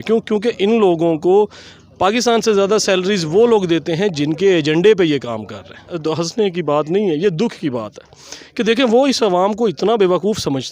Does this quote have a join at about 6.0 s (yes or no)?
yes